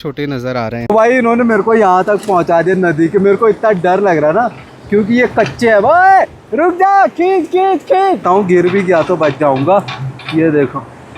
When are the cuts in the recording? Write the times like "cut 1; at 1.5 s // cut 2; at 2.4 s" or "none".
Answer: cut 1; at 0.9 s // cut 2; at 8.2 s